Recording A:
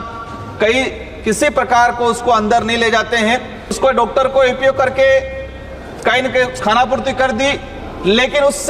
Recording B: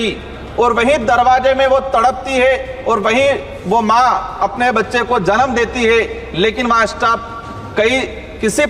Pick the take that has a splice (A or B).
A